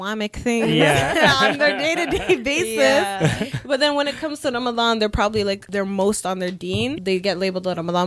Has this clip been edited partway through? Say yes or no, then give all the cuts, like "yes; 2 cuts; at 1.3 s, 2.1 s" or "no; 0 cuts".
yes; 2 cuts; at 5.6 s, 7.0 s